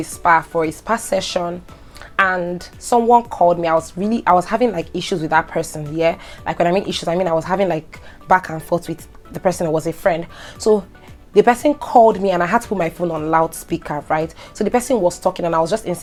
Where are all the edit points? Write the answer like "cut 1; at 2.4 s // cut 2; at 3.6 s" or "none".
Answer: none